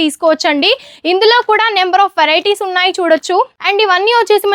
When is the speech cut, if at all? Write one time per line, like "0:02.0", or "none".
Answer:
0:03.5